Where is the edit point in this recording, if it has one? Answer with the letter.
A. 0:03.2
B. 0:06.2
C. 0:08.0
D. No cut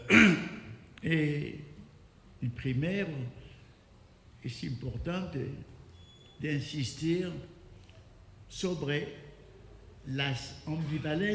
A